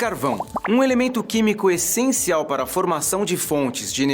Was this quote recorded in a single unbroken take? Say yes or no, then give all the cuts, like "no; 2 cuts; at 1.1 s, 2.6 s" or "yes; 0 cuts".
no; 1 cut; at 3.2 s